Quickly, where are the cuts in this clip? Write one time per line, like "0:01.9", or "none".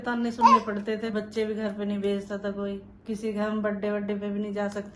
0:01.1
0:02.9